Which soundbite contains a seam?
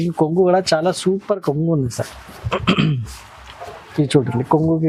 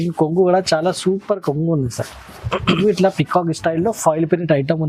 second; 1 cut; at 2.8 s

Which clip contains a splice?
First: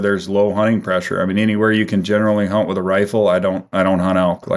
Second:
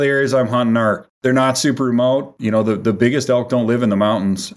second; 2 cuts; at 1.1 s, 2.3 s

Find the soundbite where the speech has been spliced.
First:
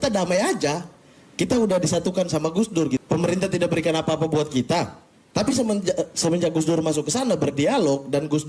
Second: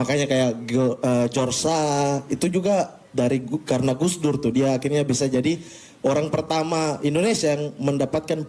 first; 1 cut; at 3.0 s

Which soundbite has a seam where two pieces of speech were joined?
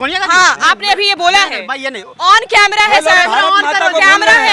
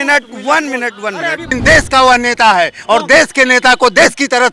second; 1 cut; at 1.5 s

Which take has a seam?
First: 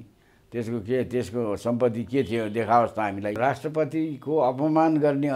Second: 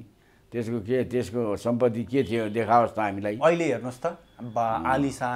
first; 1 cut; at 3.4 s

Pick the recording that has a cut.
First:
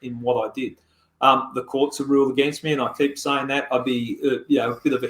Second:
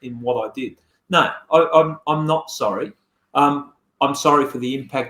second; 1 cut; at 0.9 s

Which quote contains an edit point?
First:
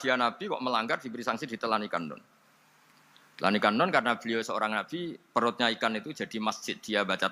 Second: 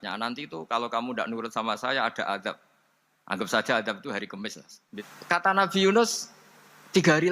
second; 1 cut; at 5.0 s

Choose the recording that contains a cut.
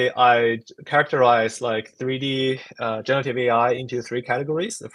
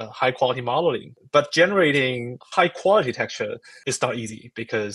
second; 3 cuts; at 1.2 s, 2.3 s, 3.7 s

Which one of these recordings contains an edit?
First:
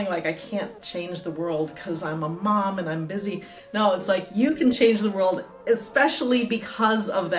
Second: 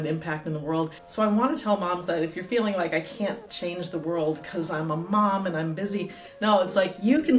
second; 1 cut; at 1.0 s

